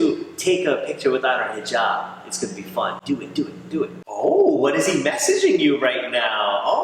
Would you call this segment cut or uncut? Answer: uncut